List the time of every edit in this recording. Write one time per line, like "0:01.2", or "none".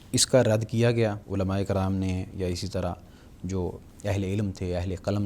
0:01.2